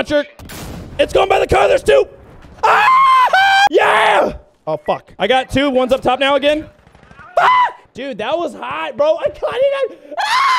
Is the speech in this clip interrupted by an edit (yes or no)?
no